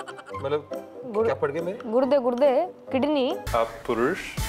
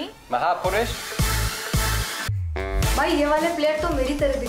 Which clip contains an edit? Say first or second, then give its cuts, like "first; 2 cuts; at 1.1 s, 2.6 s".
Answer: first; 1 cut; at 3.4 s